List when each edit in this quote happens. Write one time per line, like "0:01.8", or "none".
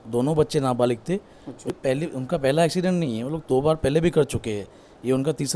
0:01.7